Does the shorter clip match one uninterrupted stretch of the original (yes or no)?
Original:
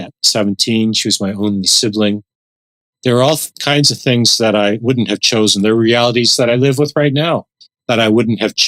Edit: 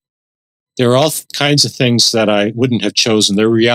yes